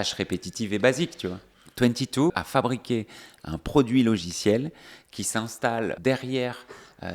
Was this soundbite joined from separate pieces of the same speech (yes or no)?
yes